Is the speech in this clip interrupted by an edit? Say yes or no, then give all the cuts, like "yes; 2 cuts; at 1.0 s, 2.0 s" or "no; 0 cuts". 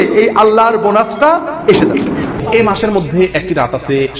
yes; 1 cut; at 2.6 s